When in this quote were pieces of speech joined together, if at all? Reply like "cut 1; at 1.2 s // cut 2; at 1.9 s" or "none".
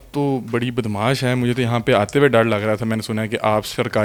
none

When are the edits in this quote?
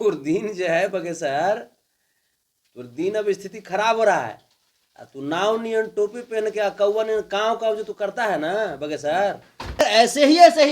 cut 1; at 9.8 s

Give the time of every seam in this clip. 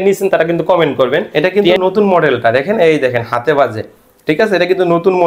cut 1; at 1.3 s

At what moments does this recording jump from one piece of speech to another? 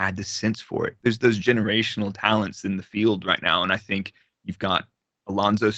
cut 1; at 0.9 s

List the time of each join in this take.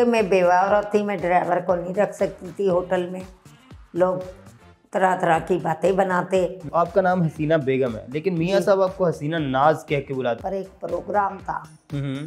cut 1; at 6.6 s // cut 2; at 10.4 s

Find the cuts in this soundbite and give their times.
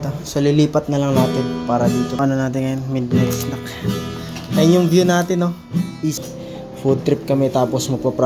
cut 1; at 2.2 s // cut 2; at 6.2 s

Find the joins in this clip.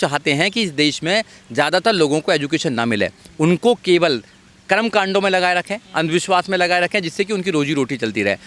none

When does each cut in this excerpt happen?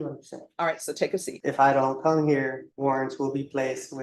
cut 1; at 1.3 s // cut 2; at 2.7 s

